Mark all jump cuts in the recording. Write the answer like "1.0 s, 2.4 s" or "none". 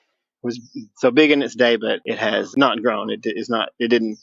2.5 s